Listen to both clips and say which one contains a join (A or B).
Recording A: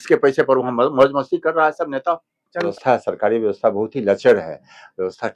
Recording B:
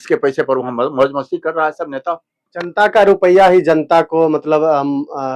A